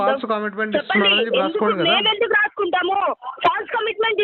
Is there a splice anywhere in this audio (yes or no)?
yes